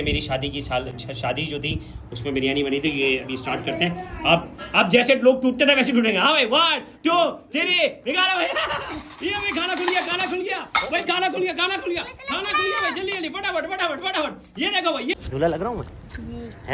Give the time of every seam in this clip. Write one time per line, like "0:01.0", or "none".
0:15.2